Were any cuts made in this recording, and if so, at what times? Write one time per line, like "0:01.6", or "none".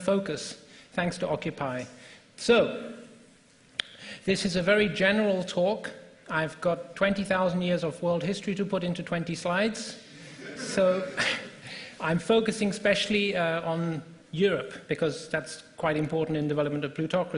0:14.9